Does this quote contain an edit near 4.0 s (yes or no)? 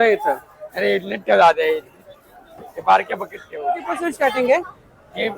yes